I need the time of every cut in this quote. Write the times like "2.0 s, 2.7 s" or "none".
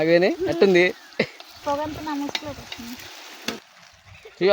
1.6 s, 3.6 s